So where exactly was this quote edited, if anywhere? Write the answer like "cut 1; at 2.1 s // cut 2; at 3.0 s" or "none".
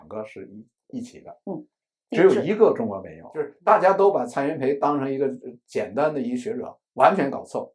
cut 1; at 3.5 s